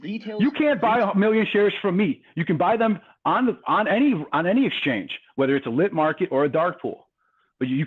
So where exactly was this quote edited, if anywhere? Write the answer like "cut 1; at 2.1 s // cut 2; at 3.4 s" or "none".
cut 1; at 3.8 s